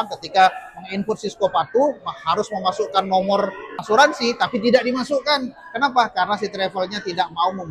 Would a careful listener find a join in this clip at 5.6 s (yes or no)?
no